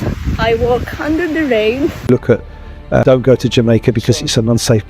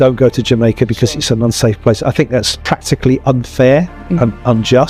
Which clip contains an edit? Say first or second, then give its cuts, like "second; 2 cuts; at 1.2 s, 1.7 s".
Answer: first; 1 cut; at 2.0 s